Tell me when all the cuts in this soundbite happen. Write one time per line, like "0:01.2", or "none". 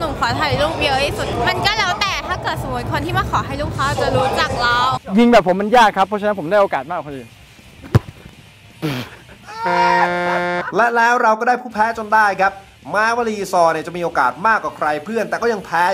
0:01.3
0:05.0
0:07.3

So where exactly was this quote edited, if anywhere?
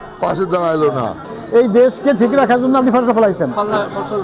0:01.3

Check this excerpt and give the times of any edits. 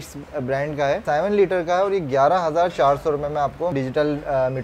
0:01.0
0:03.7

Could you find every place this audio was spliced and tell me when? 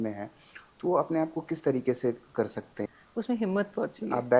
0:02.9

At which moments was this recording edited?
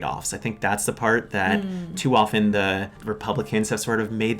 0:02.9

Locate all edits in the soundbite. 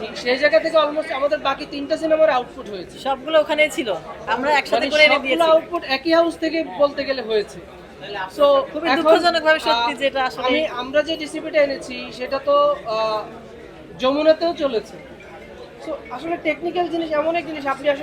none

